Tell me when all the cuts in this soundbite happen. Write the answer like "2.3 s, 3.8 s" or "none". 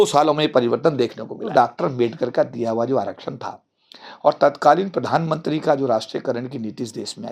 1.5 s

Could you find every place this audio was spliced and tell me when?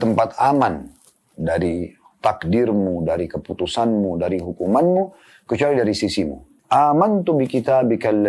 6.5 s

